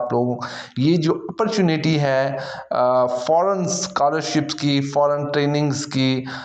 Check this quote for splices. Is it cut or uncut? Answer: uncut